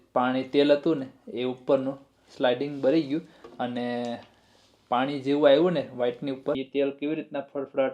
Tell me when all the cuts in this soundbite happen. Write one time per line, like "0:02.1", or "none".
0:06.6

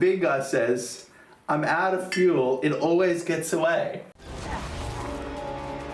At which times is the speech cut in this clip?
0:04.3

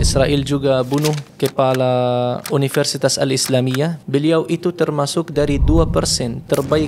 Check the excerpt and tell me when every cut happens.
0:01.3
0:02.4
0:04.0

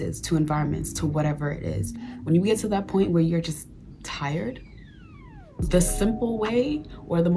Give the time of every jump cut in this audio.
0:02.3
0:05.6

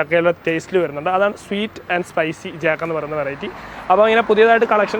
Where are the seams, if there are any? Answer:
none

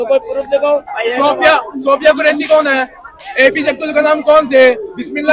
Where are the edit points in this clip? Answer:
0:00.9

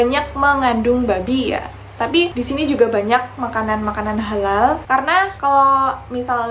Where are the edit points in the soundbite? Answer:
none

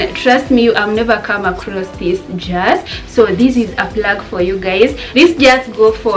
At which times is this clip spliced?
0:05.0

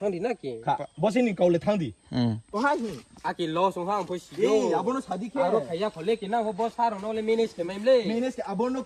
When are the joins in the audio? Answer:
0:02.6

